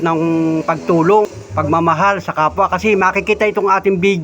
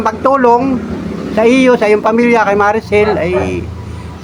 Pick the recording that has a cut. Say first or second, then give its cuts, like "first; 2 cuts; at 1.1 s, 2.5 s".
first; 1 cut; at 1.3 s